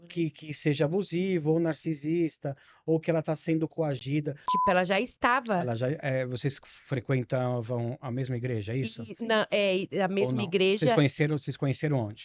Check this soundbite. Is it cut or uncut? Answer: cut